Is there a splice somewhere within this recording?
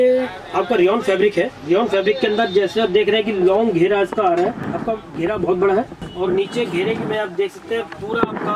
no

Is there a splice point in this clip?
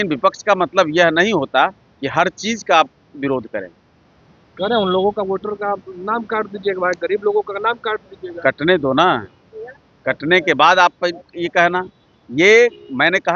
no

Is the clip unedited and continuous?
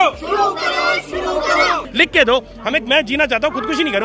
no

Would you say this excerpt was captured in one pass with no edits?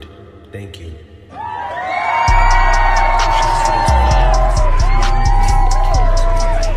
yes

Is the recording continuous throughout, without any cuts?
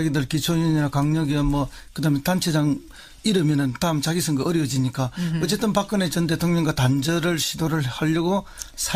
yes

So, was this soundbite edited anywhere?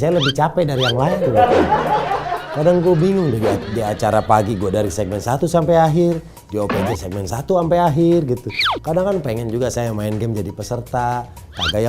no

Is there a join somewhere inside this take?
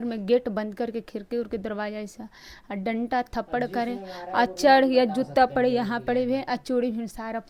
no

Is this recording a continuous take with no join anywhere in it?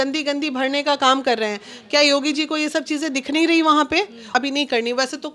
no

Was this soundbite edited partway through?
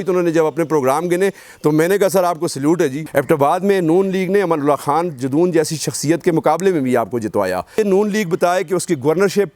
yes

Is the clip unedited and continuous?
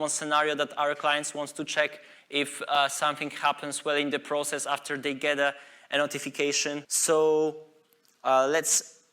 no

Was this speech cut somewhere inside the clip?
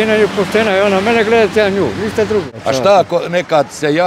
yes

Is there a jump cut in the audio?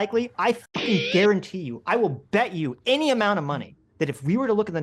no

